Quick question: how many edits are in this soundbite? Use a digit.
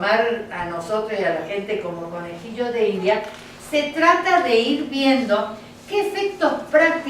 1